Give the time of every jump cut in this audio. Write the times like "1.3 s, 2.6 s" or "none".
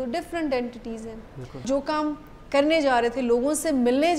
1.6 s